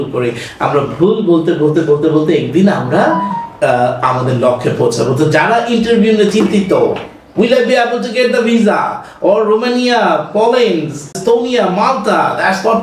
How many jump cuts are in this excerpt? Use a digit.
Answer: 1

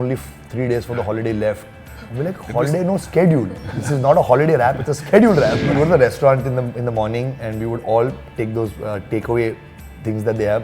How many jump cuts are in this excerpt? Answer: 1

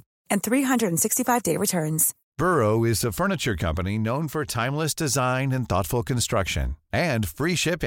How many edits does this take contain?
0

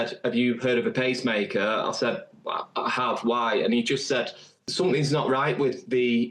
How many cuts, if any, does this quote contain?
1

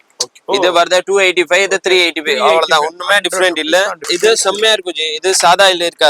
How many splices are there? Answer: 1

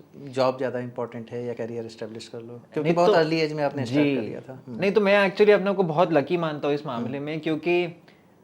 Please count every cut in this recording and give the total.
1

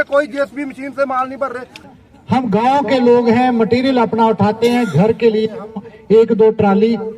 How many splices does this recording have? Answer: 1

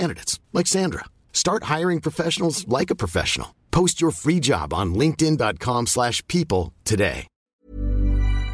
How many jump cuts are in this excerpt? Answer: 1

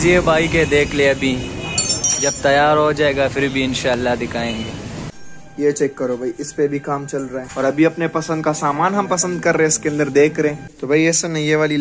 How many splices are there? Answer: 3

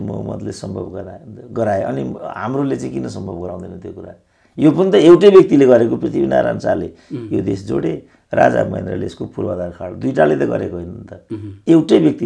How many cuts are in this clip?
0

